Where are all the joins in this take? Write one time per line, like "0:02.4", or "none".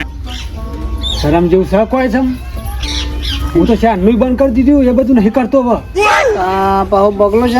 none